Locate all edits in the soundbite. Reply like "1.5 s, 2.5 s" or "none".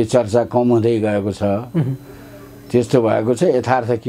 none